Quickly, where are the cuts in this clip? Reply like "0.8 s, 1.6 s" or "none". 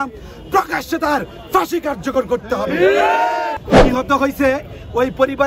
3.6 s